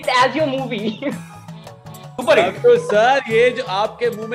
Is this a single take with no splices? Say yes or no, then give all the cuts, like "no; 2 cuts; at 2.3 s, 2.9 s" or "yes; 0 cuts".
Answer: yes; 0 cuts